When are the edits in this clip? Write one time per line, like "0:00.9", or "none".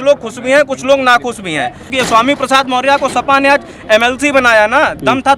0:01.9